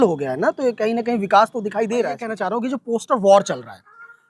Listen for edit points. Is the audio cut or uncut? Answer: cut